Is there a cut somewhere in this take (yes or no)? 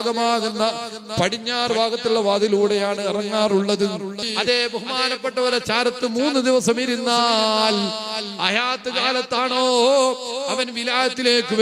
yes